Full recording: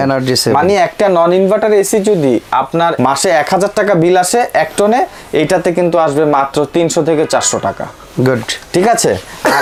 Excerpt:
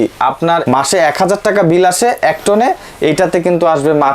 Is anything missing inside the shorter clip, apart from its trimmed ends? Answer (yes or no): no